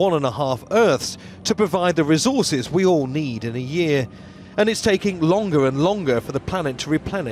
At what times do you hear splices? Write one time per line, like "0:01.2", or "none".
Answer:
none